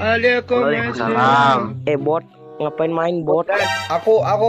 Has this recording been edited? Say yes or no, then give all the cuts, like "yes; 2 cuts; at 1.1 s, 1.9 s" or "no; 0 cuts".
yes; 1 cut; at 1.7 s